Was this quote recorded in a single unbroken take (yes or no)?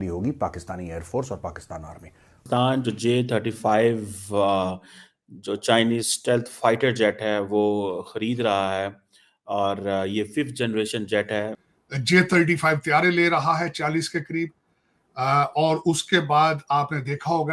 no